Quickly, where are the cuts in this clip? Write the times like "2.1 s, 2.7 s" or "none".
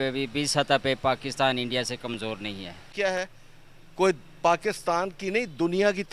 2.8 s